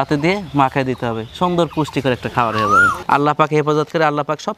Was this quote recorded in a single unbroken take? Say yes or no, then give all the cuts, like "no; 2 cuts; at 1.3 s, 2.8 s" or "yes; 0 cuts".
no; 1 cut; at 2.9 s